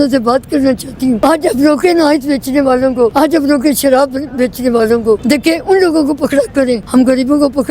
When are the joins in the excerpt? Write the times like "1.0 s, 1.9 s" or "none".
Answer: 1.2 s, 3.1 s, 5.2 s, 6.8 s